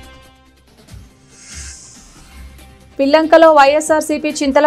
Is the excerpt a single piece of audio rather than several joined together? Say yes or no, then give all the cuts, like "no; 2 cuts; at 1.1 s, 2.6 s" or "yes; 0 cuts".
no; 2 cuts; at 1.3 s, 2.6 s